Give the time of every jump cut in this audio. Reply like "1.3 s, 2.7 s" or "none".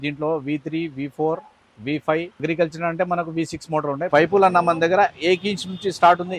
2.4 s, 4.1 s